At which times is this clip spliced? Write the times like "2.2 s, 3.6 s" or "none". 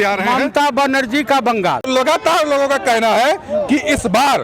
1.8 s